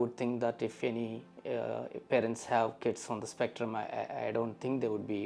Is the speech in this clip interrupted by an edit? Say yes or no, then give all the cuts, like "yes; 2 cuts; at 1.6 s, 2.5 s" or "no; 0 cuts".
no; 0 cuts